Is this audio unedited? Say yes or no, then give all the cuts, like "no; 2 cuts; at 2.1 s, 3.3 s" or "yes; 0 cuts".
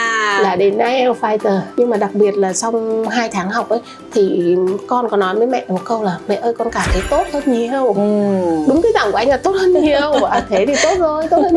no; 1 cut; at 1.7 s